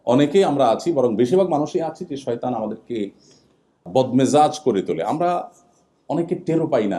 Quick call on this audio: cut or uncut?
cut